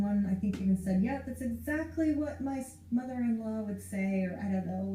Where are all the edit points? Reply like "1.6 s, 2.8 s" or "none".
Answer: none